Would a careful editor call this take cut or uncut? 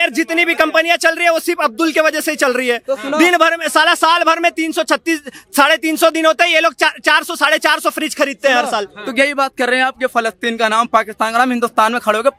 uncut